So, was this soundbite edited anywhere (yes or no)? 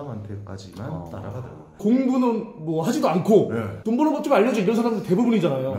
no